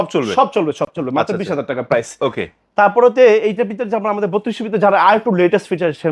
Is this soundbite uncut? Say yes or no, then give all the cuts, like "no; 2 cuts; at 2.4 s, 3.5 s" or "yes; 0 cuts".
yes; 0 cuts